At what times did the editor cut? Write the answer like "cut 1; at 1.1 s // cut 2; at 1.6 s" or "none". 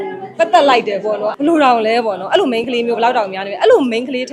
cut 1; at 1.3 s